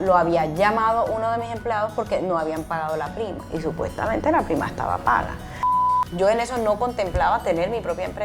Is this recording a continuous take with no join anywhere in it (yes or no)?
no